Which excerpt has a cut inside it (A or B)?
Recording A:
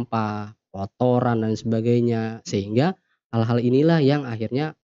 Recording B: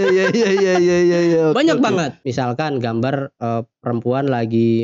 B